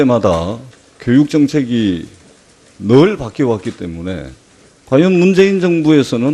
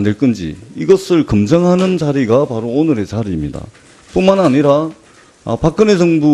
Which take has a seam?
second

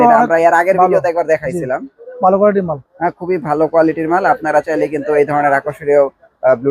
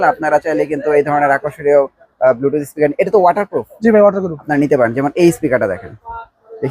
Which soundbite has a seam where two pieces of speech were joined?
second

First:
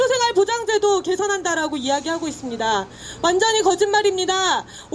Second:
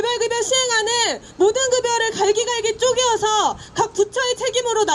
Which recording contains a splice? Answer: first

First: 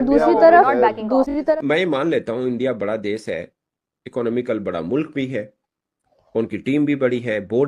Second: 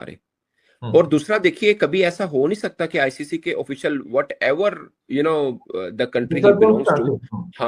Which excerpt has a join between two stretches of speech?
first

